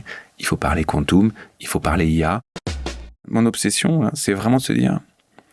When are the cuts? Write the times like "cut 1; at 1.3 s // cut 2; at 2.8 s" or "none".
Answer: cut 1; at 2.7 s